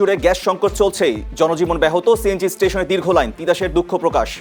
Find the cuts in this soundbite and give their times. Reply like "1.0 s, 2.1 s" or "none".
none